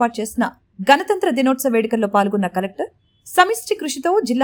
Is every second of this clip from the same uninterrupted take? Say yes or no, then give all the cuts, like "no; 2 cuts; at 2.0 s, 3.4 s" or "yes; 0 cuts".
yes; 0 cuts